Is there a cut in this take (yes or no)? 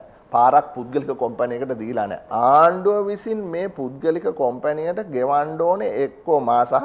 yes